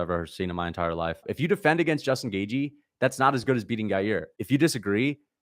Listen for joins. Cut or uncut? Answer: cut